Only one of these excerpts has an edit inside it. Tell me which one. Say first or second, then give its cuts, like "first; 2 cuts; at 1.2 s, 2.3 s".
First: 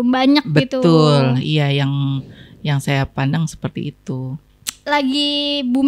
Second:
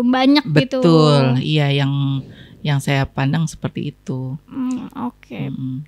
first; 1 cut; at 4.4 s